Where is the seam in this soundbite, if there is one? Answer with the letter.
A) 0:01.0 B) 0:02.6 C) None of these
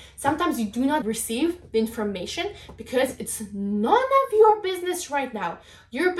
A